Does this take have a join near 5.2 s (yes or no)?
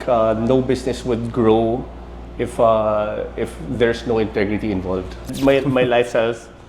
yes